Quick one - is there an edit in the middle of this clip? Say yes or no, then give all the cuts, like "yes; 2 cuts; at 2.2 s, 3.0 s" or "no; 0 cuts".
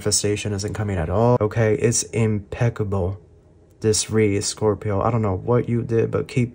yes; 1 cut; at 1.4 s